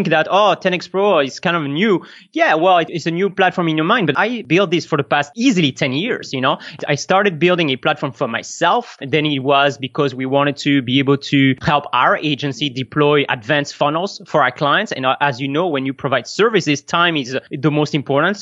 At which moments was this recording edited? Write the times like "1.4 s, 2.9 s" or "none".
4.4 s

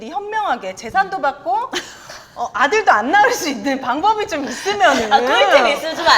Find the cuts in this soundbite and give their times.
none

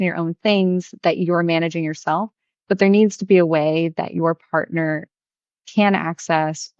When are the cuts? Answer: none

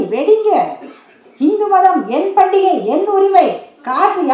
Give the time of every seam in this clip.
none

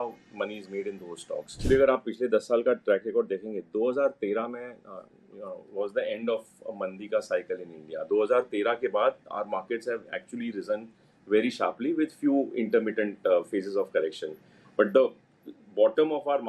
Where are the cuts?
1.6 s

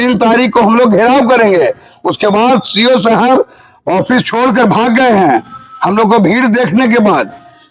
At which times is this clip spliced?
none

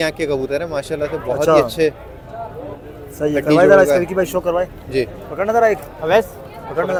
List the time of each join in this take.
none

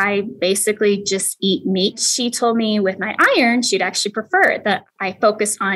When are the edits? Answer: 2.0 s, 4.9 s

